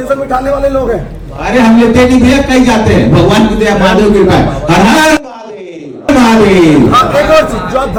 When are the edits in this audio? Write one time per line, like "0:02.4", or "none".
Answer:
none

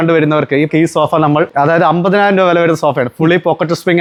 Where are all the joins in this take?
none

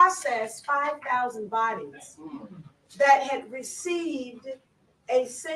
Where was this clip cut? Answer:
none

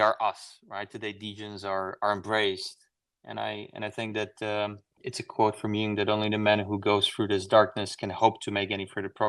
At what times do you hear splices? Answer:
0:05.0

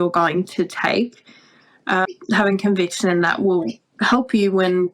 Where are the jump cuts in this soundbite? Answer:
0:02.1
0:03.8

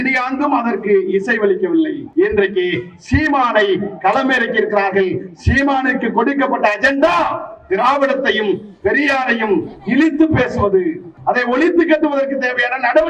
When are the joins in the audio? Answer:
0:02.0
0:11.1

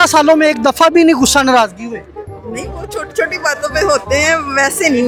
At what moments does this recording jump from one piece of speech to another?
none

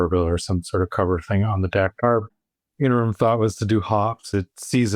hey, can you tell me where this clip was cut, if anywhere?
0:02.3

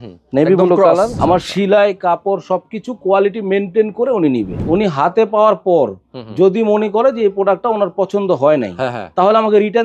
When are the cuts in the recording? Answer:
0:01.1
0:04.5

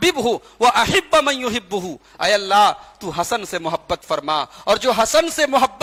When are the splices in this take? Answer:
none

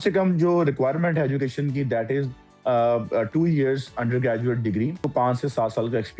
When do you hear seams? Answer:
0:05.0

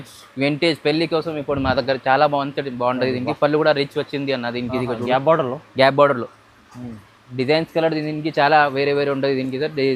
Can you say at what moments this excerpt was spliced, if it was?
none

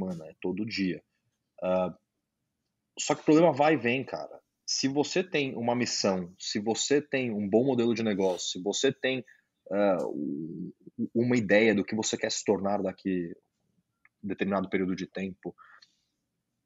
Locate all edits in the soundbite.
none

